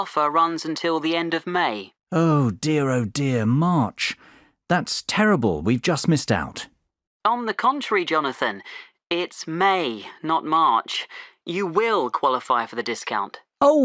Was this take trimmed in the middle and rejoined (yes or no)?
no